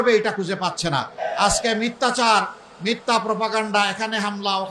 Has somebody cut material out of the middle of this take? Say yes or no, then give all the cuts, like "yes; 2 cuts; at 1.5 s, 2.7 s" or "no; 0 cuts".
yes; 1 cut; at 1.1 s